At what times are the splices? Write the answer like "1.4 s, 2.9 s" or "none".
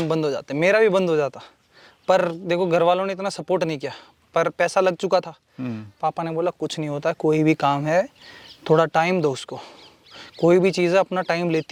none